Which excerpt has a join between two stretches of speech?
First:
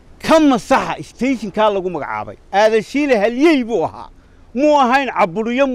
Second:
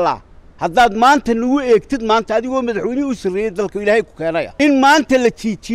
second; 1 cut; at 4.5 s

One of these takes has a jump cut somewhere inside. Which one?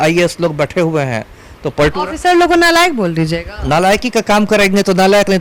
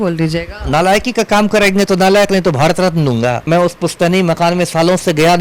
second; 1 cut; at 3.4 s

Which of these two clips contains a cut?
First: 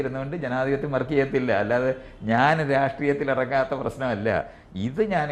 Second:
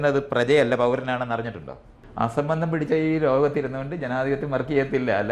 second; 1 cut; at 2.0 s

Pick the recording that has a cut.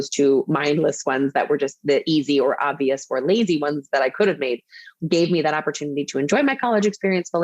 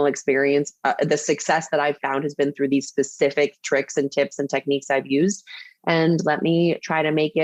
first; 1 cut; at 4.9 s

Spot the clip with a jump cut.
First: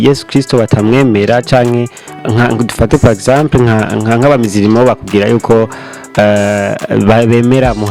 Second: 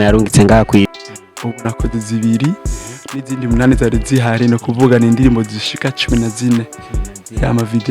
second; 1 cut; at 1.0 s

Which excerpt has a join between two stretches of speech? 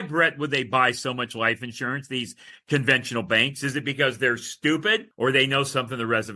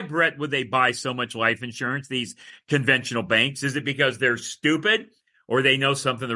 first; 1 cut; at 5.1 s

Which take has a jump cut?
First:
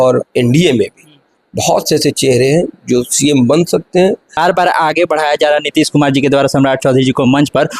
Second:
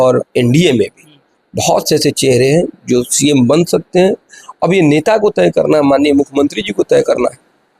first; 1 cut; at 4.3 s

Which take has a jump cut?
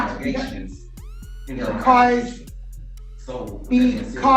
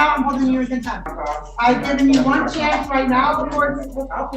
second; 1 cut; at 1.1 s

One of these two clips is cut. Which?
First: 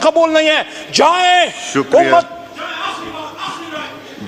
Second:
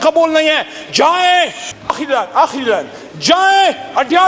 second; 1 cut; at 1.6 s

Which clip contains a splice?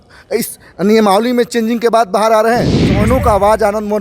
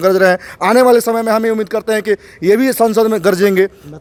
first; 1 cut; at 2.8 s

